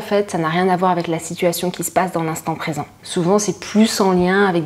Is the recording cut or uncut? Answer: cut